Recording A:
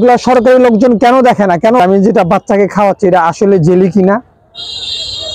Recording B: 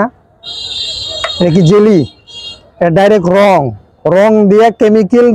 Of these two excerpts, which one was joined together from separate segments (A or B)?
A